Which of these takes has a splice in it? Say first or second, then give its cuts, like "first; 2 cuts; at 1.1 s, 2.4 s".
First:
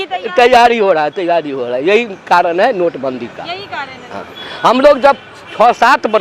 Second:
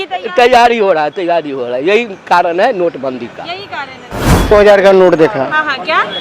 second; 1 cut; at 4.5 s